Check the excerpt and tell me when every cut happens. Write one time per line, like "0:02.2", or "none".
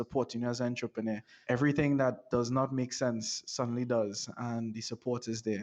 0:01.3